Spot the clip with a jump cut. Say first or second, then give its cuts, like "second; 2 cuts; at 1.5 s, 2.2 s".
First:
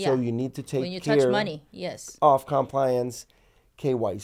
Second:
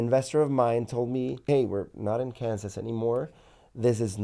second; 1 cut; at 1.5 s